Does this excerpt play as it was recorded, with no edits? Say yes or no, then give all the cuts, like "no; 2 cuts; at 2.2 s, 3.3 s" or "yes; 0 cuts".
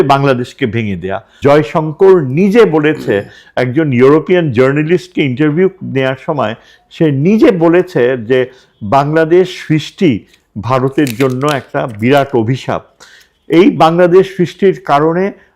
no; 1 cut; at 1.2 s